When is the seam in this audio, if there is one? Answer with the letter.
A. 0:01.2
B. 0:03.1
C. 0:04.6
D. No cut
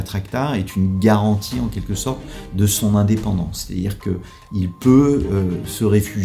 D